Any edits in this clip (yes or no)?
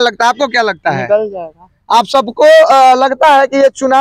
no